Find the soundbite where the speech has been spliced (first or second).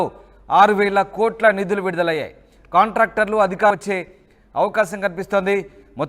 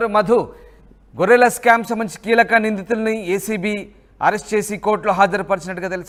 first